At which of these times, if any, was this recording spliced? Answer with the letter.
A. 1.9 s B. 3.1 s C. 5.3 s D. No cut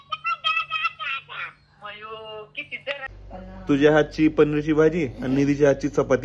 B